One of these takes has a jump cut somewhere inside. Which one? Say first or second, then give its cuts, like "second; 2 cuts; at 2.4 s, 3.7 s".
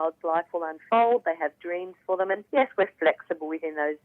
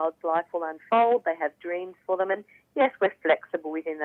first; 1 cut; at 2.4 s